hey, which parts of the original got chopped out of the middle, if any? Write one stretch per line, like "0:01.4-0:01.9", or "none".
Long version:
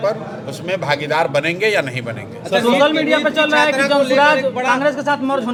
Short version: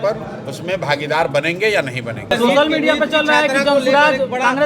0:02.2-0:02.5